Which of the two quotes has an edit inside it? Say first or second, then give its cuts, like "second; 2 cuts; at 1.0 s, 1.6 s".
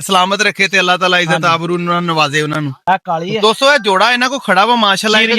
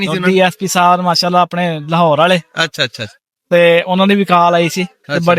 first; 1 cut; at 2.8 s